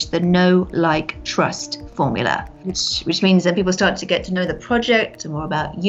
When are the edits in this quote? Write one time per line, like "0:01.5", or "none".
0:02.5

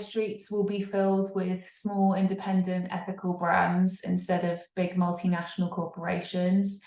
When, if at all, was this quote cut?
none

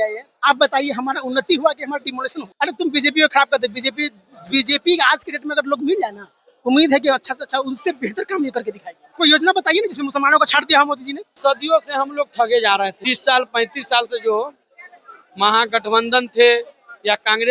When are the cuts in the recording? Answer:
0:02.4
0:09.0
0:11.3
0:13.1

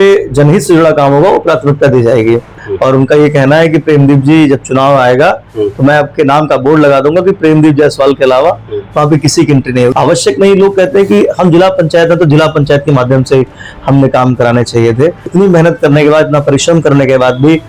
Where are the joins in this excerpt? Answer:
0:02.5
0:09.9
0:15.2

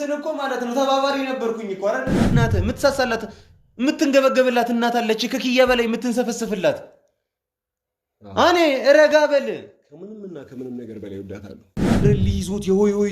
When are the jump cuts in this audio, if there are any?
0:02.2
0:12.0

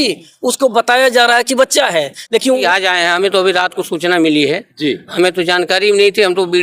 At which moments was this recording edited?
0:02.6

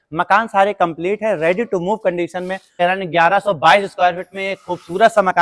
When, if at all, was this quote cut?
0:02.7

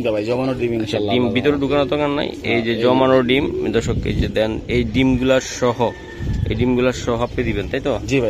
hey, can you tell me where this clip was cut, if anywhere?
none

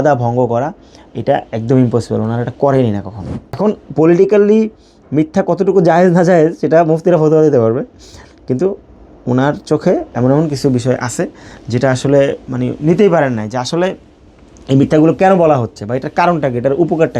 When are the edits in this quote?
0:03.6

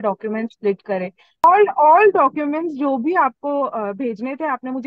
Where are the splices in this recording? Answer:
0:01.4

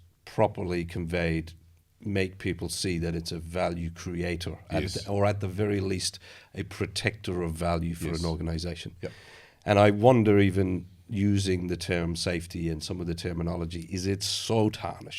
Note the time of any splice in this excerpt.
none

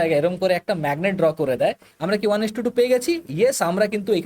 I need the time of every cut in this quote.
0:01.9

